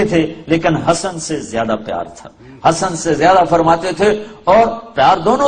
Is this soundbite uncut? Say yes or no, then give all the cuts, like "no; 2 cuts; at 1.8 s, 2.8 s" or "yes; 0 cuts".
yes; 0 cuts